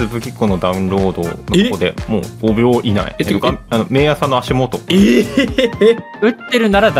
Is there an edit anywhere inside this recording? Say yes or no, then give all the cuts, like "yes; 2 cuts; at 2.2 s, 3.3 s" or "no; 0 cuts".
yes; 5 cuts; at 1.4 s, 2.3 s, 3.1 s, 4.8 s, 6.1 s